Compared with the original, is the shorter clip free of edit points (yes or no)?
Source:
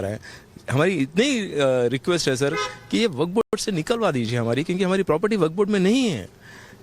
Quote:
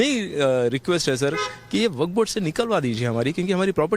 no